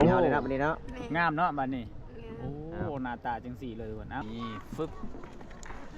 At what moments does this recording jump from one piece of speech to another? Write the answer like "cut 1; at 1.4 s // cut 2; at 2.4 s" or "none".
cut 1; at 4.2 s